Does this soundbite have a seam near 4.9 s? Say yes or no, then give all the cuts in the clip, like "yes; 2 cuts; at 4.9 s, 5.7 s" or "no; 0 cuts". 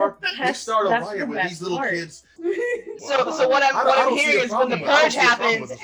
no; 1 cut; at 2.4 s